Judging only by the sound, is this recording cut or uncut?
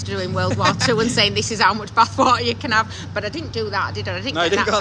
uncut